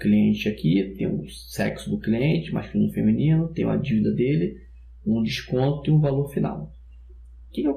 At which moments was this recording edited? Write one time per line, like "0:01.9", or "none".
0:01.8

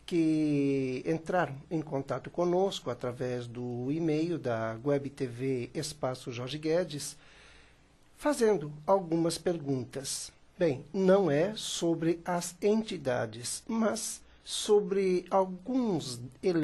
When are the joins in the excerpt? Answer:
0:09.0

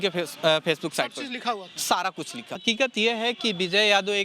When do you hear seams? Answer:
0:02.5

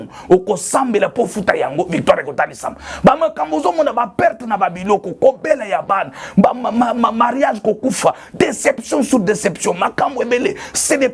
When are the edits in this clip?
none

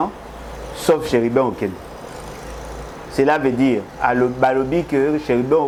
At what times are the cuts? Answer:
none

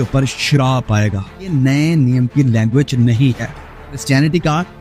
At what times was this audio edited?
0:01.5
0:04.0

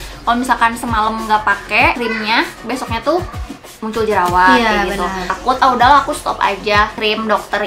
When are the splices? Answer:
0:02.0
0:05.4

